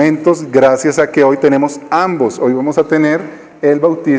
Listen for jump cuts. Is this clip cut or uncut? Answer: cut